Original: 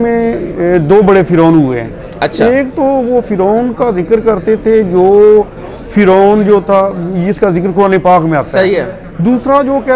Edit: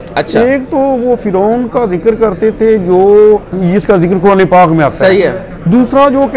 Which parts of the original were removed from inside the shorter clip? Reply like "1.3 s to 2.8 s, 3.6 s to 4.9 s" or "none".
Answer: 5.6 s to 7.1 s